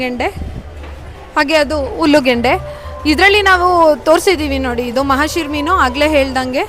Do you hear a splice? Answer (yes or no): no